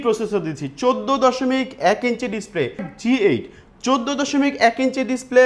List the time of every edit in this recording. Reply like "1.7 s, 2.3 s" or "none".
2.8 s